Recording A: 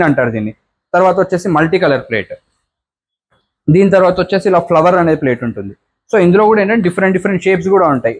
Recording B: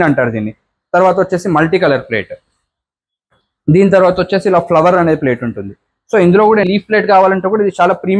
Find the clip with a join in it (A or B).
B